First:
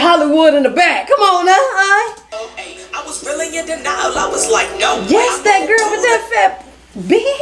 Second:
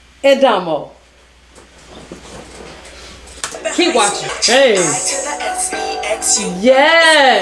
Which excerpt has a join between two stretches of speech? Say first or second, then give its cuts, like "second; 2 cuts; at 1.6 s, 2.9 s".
second; 1 cut; at 4.3 s